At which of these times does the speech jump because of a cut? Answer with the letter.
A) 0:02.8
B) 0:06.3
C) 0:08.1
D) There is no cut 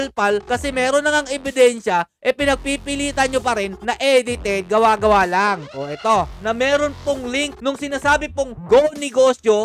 B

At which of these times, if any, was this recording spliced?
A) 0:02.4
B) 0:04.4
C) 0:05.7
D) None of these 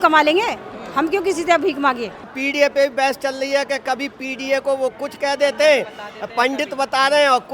A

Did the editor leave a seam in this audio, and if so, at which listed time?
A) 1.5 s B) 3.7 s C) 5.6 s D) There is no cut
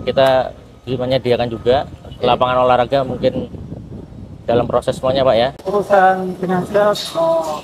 C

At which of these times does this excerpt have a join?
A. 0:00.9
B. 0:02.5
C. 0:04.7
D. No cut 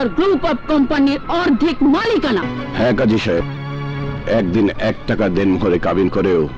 B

